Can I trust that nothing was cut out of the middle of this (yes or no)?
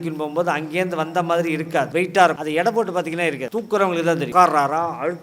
no